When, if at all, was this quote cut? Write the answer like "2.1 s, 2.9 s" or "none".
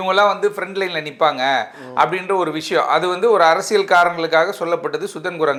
none